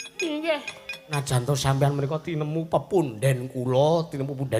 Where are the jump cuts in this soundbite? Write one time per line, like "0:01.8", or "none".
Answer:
0:01.1